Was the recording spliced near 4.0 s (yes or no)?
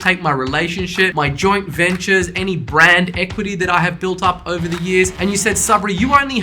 no